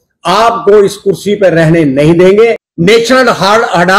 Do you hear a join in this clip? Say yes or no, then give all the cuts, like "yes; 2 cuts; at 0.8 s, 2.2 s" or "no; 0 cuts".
yes; 1 cut; at 2.7 s